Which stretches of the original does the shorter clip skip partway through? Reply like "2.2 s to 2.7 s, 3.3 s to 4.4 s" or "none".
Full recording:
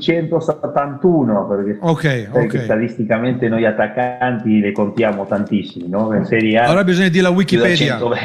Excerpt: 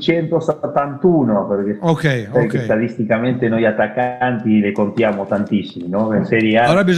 none